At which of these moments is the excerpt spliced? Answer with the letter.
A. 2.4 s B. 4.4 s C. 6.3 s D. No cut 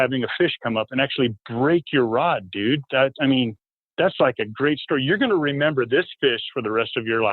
B